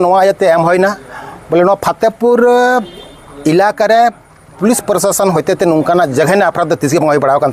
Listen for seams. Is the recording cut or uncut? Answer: uncut